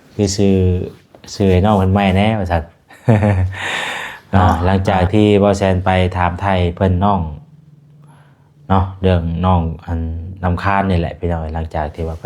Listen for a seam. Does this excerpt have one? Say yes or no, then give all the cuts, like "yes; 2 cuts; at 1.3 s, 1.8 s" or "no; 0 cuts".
yes; 1 cut; at 4.6 s